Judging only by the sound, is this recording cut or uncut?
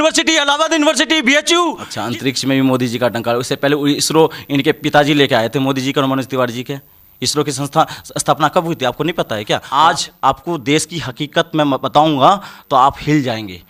cut